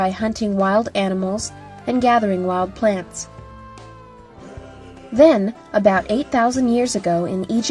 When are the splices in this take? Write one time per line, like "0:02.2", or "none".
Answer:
0:02.4